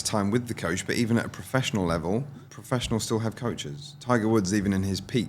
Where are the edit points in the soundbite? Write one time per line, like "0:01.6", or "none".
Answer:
0:02.4